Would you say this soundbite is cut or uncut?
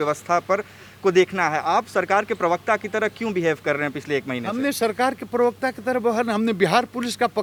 uncut